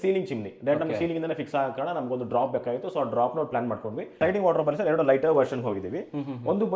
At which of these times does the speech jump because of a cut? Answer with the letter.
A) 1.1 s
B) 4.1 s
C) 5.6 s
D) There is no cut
B